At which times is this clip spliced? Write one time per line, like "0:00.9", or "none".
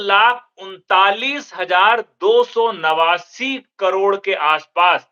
none